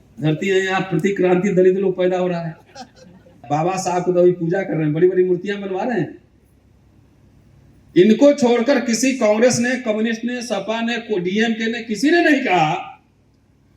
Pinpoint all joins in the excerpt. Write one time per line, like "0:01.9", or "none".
0:03.4